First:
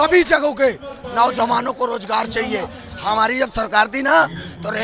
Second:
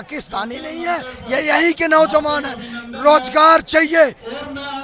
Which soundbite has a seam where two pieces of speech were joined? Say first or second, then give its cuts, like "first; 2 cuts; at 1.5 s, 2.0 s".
first; 1 cut; at 2.9 s